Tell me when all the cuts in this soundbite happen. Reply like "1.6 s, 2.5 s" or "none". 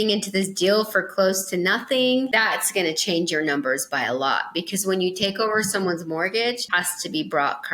2.3 s, 6.6 s